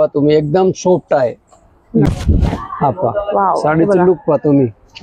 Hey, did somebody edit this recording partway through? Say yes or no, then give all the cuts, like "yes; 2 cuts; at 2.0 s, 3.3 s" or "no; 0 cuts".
yes; 1 cut; at 2.1 s